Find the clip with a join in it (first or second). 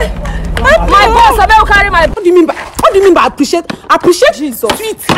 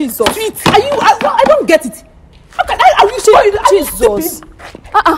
first